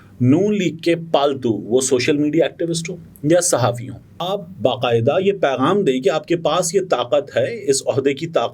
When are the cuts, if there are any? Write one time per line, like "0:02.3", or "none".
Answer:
0:04.2